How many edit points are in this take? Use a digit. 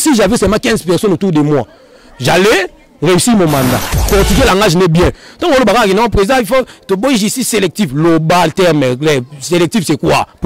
1